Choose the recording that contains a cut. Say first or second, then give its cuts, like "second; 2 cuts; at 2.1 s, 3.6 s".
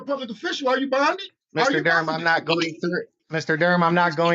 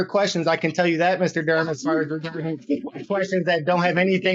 first; 2 cuts; at 1.3 s, 3.2 s